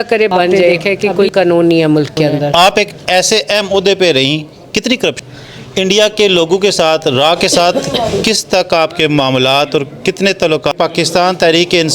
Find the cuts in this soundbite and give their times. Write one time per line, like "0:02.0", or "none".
0:00.9
0:02.5
0:05.2
0:10.7